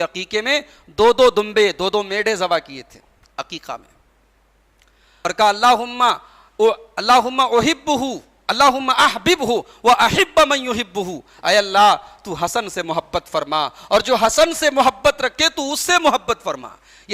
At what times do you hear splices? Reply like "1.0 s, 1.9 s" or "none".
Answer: 5.1 s